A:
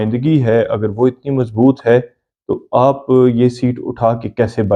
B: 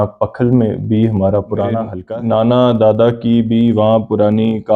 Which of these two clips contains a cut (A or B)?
B